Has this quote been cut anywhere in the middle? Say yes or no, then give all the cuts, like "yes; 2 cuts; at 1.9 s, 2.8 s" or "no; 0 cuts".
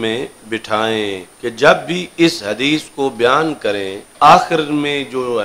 yes; 2 cuts; at 1.3 s, 4.0 s